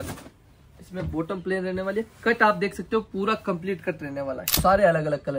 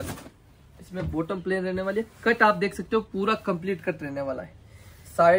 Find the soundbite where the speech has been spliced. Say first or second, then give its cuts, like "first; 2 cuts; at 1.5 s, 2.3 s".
first; 1 cut; at 4.5 s